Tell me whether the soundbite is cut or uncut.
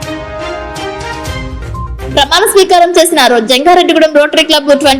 uncut